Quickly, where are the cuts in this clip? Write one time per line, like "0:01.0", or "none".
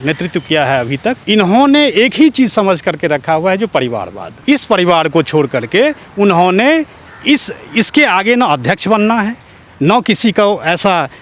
0:01.2
0:04.3